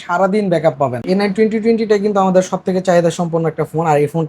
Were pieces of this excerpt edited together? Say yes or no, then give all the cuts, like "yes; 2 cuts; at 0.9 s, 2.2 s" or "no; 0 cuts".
yes; 1 cut; at 1.0 s